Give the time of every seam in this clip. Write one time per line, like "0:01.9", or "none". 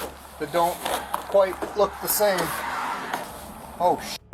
0:03.4